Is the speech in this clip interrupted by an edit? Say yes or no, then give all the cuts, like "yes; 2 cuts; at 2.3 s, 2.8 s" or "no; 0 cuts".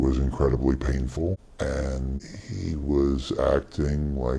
yes; 2 cuts; at 1.5 s, 2.2 s